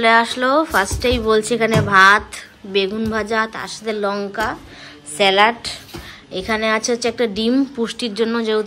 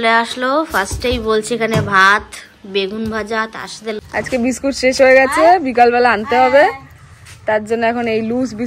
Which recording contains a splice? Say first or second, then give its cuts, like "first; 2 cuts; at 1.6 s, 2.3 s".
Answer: second; 1 cut; at 4.0 s